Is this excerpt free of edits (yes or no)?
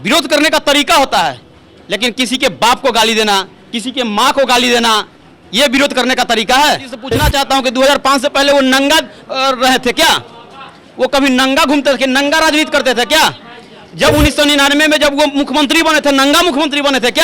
no